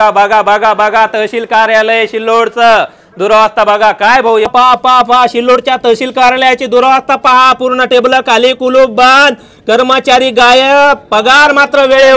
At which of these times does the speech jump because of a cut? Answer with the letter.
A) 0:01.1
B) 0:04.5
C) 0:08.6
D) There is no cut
B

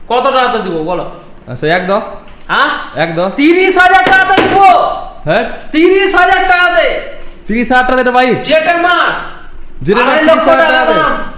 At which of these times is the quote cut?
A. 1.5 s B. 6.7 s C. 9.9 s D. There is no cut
D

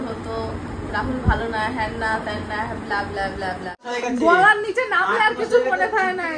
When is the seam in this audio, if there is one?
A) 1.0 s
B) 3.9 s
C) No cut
B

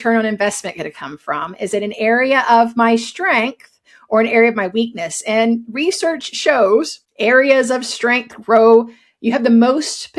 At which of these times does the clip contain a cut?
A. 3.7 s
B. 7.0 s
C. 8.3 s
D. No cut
B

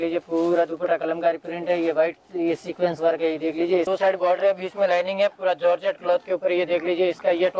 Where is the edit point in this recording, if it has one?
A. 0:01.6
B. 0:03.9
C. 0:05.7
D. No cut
B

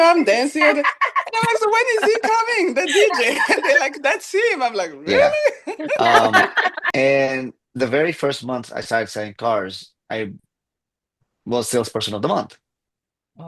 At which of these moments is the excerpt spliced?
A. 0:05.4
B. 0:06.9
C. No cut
B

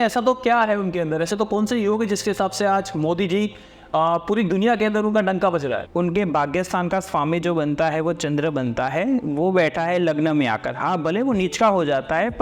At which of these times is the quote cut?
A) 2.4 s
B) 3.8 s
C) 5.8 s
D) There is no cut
C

